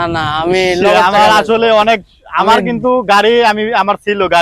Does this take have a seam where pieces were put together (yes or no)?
no